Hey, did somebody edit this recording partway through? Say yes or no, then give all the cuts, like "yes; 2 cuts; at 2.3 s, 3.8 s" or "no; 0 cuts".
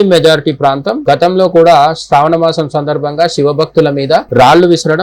yes; 1 cut; at 0.9 s